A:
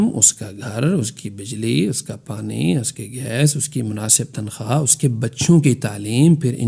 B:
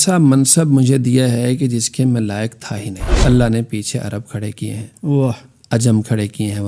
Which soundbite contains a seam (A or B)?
B